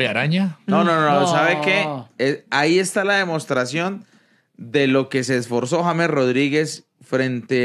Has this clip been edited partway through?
no; 0 cuts

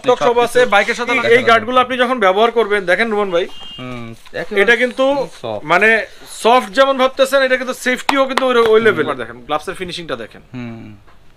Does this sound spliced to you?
yes; 2 cuts; at 1.0 s, 9.1 s

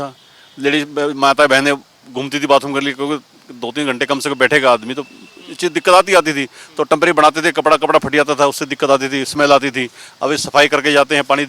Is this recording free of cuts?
yes; 0 cuts

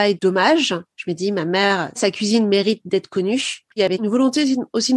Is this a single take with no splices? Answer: no; 1 cut; at 4.0 s

